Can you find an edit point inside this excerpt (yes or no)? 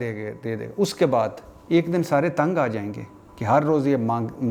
no